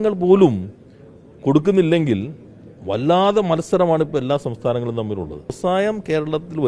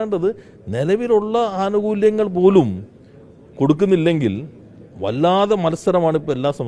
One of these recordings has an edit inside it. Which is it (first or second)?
first